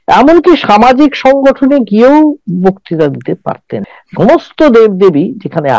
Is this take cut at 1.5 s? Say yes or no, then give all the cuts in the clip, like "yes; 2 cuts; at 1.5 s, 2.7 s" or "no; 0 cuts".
no; 1 cut; at 3.7 s